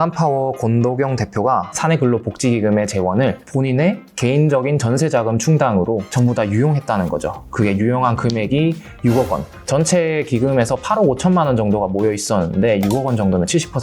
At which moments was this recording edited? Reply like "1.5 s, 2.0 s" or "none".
1.8 s